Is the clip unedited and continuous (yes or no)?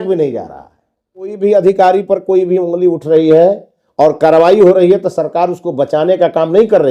no